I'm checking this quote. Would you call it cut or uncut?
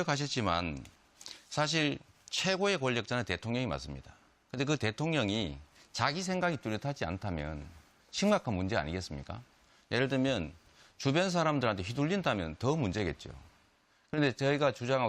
uncut